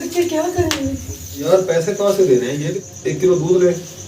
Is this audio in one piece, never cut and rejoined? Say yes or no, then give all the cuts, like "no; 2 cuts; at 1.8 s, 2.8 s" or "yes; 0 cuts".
no; 2 cuts; at 1.4 s, 2.4 s